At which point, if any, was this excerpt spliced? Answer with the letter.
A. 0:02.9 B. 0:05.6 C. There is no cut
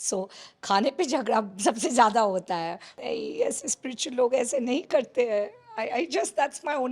A